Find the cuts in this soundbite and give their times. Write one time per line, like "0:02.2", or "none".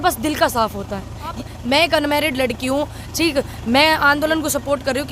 0:01.4